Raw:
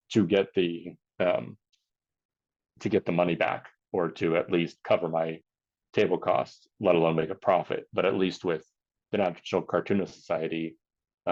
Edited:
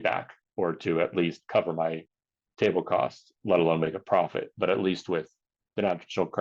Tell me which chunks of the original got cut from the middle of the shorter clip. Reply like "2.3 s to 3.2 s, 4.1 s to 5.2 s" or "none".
none